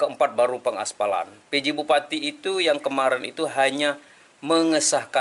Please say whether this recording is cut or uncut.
uncut